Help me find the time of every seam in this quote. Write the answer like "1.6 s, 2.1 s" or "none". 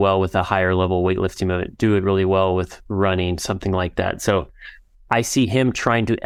none